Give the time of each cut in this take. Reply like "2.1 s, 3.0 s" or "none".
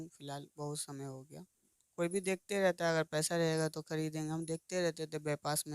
1.8 s